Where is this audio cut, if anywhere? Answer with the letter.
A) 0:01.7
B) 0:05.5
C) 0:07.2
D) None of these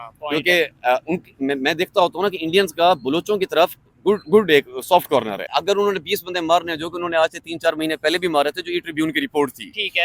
B